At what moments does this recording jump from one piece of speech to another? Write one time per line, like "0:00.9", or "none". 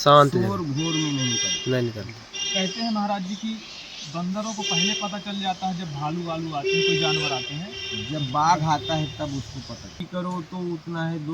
0:10.0